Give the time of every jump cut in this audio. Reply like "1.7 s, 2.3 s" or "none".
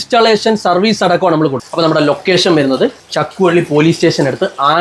1.6 s, 3.1 s